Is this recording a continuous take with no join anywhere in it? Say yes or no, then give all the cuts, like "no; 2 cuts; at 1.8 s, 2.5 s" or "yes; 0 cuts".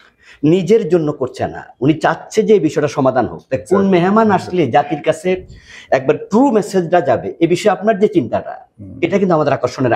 yes; 0 cuts